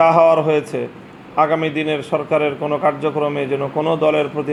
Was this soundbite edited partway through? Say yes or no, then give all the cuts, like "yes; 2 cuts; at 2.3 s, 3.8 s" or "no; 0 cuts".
no; 0 cuts